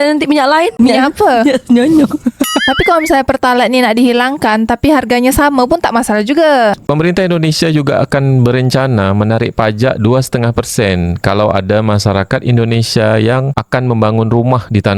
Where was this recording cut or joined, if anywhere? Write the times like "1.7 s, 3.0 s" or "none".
6.8 s